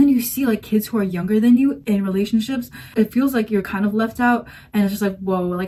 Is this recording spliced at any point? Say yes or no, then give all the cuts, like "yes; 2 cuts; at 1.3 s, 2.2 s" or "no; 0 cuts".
no; 0 cuts